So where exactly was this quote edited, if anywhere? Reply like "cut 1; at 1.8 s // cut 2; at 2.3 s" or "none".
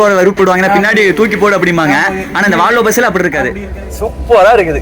cut 1; at 3.7 s